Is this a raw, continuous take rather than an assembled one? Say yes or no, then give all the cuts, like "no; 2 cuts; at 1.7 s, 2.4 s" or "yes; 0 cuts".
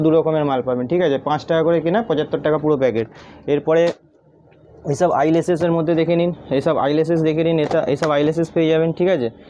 yes; 0 cuts